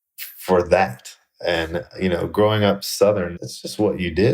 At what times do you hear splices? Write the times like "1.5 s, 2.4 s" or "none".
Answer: none